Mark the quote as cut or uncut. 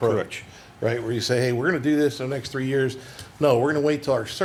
uncut